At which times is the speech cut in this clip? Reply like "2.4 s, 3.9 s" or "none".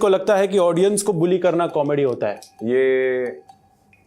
none